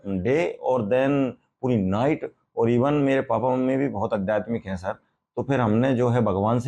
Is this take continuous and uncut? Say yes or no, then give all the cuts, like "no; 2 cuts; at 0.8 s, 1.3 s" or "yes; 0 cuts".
yes; 0 cuts